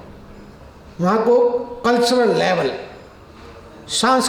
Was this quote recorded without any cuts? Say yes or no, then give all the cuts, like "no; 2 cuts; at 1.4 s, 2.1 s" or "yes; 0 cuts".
yes; 0 cuts